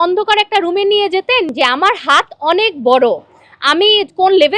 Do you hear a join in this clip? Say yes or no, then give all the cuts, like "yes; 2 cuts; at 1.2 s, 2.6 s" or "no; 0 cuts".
yes; 1 cut; at 1.5 s